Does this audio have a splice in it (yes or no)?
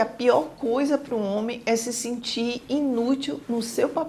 no